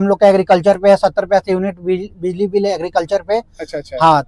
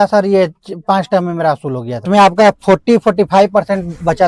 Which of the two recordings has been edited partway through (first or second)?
second